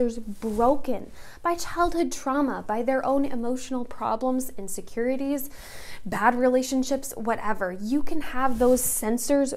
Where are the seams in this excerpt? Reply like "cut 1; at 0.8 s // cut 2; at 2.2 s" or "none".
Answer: none